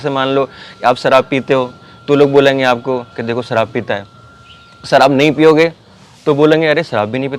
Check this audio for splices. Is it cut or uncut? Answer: uncut